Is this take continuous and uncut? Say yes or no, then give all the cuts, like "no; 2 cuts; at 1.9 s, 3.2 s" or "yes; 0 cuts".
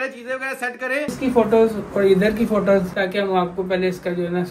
no; 2 cuts; at 1.1 s, 2.9 s